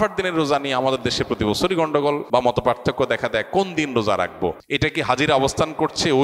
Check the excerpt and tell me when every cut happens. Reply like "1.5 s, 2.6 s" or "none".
2.2 s, 4.6 s